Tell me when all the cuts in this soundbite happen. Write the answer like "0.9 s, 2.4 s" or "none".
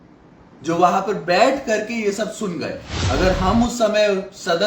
2.9 s